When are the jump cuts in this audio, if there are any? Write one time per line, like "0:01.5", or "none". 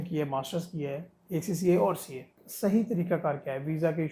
0:02.4

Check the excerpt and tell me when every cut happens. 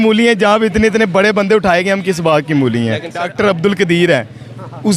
0:03.2

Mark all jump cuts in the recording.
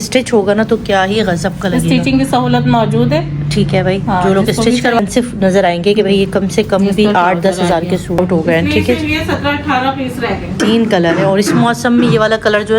0:05.0
0:08.2
0:10.5

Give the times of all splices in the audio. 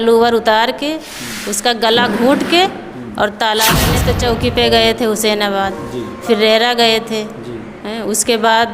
0:04.0

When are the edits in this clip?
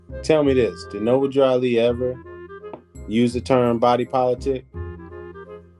0:04.7

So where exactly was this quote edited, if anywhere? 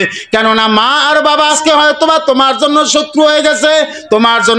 0:01.6

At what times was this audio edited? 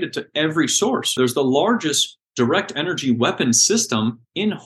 0:01.2

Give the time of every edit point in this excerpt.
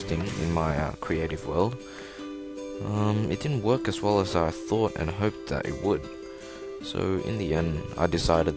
0:06.4

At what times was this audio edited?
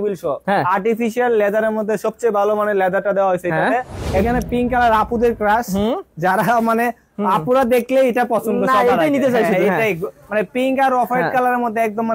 0:04.2

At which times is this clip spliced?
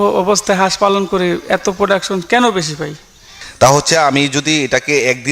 0:03.4

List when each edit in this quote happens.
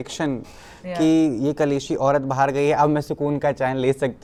none

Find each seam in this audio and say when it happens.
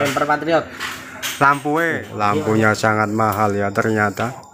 0:02.1

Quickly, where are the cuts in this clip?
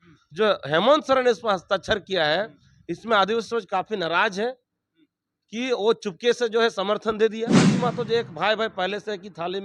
0:07.7

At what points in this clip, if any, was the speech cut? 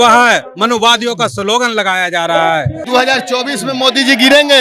0:02.8

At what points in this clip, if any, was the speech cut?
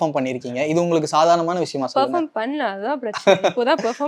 none

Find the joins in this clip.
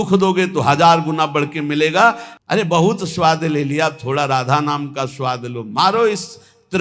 0:02.3

